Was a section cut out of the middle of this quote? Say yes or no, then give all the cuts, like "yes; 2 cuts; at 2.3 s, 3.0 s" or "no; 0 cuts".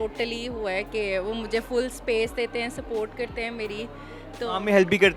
no; 0 cuts